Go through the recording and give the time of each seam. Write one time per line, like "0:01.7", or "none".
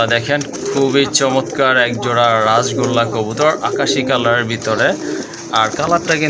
none